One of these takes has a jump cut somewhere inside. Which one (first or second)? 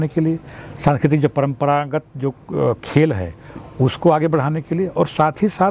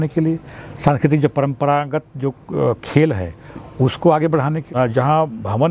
second